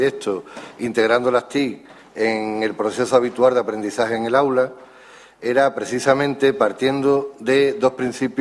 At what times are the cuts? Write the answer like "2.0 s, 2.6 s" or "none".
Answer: 7.4 s